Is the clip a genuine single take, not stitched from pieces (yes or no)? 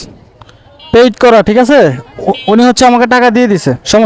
yes